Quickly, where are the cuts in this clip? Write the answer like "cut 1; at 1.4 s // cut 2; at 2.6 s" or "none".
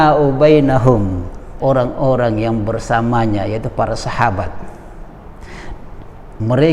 cut 1; at 1.6 s